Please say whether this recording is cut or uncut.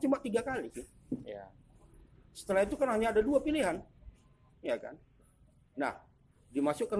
uncut